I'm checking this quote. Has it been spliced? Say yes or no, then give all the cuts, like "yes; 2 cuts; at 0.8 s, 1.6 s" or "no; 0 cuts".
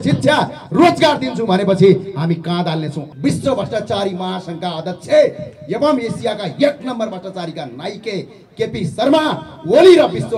yes; 1 cut; at 3.1 s